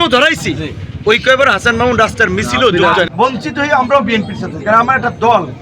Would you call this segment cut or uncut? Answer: cut